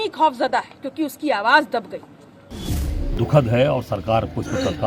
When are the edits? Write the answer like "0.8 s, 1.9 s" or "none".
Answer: 2.6 s